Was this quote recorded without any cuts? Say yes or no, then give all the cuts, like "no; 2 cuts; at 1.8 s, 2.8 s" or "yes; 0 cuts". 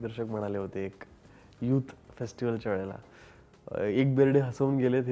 yes; 0 cuts